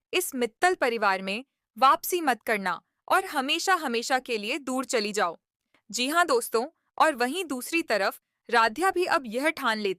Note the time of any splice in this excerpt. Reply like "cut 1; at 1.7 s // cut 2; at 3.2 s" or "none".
none